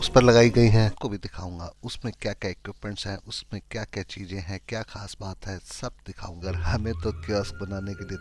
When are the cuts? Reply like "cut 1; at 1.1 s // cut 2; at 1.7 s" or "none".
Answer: cut 1; at 1.0 s // cut 2; at 6.4 s